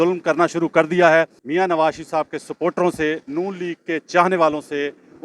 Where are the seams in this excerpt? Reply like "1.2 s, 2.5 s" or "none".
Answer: 1.4 s